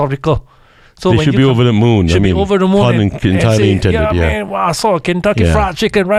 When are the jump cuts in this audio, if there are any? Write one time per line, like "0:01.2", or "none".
none